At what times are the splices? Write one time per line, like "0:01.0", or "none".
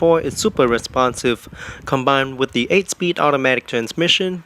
0:02.6